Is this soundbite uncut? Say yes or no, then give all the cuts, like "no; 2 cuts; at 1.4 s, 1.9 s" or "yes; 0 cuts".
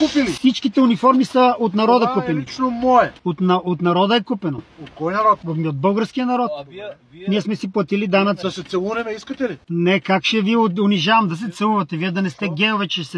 no; 3 cuts; at 5.5 s, 8.4 s, 9.6 s